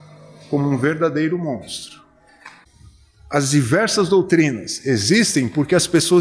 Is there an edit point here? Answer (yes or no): yes